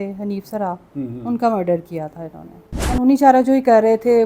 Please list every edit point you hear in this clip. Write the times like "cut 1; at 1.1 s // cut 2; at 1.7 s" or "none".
cut 1; at 3.0 s